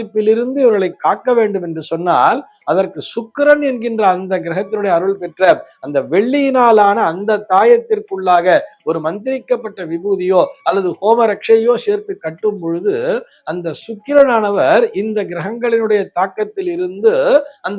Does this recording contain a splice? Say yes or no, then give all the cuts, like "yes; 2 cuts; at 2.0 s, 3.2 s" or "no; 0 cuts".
no; 0 cuts